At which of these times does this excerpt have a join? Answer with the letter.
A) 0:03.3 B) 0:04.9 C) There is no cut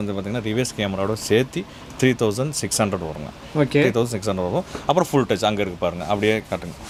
C